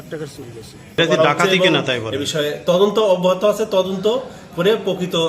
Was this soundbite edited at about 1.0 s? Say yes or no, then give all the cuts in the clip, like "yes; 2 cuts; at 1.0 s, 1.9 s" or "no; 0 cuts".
yes; 1 cut; at 1.0 s